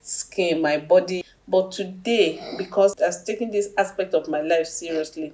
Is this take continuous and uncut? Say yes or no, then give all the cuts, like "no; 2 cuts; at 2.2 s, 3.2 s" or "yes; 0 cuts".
no; 1 cut; at 1.3 s